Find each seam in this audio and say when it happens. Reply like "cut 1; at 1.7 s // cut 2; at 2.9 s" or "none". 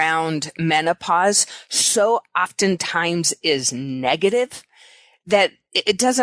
none